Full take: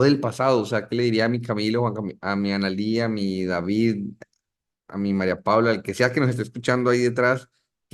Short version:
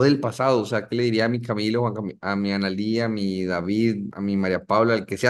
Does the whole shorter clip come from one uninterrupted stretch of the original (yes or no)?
no